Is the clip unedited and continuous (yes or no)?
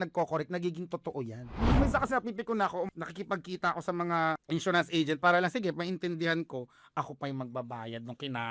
no